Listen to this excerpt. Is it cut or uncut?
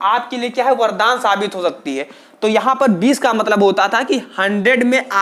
uncut